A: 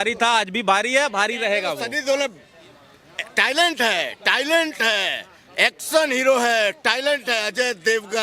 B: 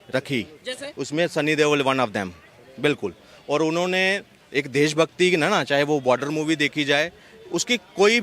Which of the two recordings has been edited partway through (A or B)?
A